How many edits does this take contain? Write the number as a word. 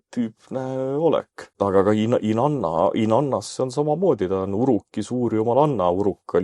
one